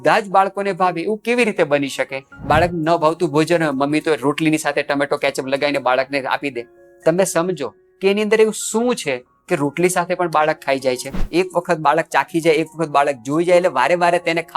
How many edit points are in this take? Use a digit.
2